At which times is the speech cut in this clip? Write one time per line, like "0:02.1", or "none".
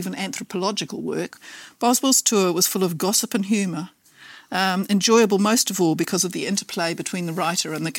0:01.3